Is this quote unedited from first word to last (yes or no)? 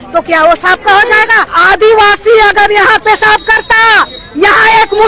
no